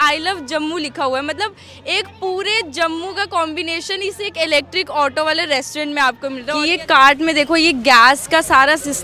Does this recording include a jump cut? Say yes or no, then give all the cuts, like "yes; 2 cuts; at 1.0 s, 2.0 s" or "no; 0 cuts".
yes; 1 cut; at 6.5 s